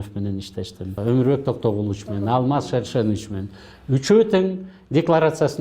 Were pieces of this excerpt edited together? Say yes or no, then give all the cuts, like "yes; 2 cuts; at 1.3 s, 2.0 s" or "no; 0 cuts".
yes; 1 cut; at 1.0 s